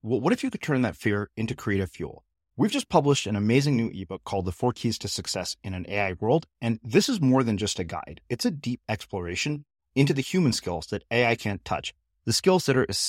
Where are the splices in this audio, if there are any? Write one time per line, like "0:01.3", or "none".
none